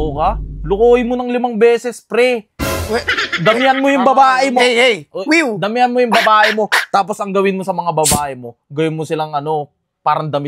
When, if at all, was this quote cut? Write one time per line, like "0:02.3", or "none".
none